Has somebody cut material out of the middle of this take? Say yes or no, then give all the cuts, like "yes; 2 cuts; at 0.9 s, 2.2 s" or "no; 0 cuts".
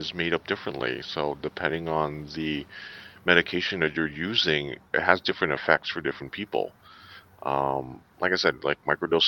no; 0 cuts